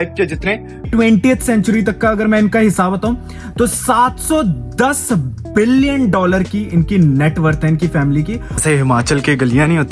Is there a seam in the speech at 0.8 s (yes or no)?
yes